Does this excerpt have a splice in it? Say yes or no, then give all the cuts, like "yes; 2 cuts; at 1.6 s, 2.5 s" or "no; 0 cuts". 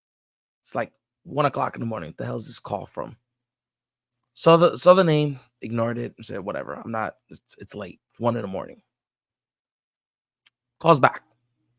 no; 0 cuts